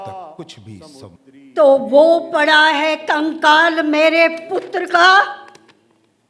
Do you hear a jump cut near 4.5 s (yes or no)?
no